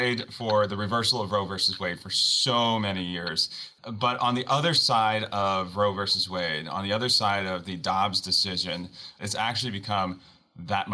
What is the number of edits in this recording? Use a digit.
2